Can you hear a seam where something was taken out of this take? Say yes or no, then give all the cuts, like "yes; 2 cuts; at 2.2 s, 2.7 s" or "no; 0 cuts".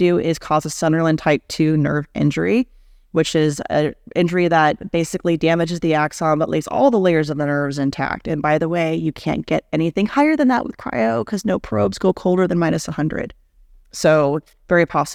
no; 0 cuts